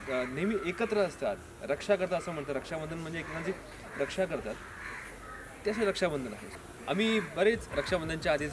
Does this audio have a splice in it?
yes; 1 cut; at 6.5 s

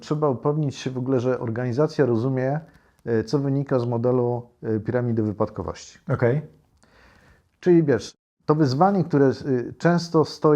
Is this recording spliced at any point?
no; 0 cuts

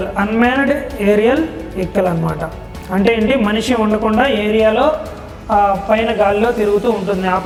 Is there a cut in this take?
no; 0 cuts

